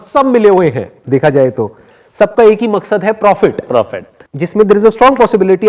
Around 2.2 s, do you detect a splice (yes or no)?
no